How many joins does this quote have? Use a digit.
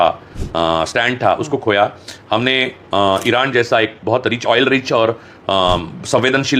0